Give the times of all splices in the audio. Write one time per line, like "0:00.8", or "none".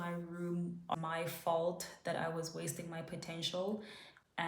0:01.0